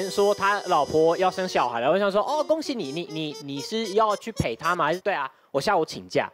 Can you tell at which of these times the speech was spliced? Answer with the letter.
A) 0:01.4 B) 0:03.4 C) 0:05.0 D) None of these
C